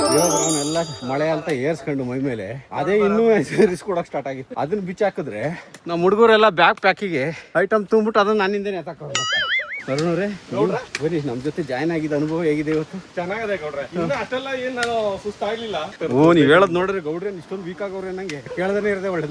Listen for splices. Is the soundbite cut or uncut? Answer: cut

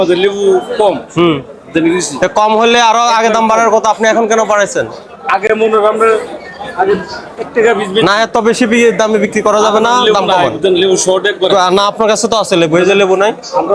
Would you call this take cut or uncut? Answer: uncut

